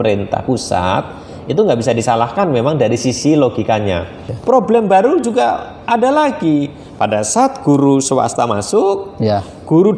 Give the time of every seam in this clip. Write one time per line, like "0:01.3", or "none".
0:04.2